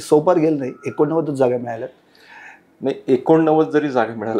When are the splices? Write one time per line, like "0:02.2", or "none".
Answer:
none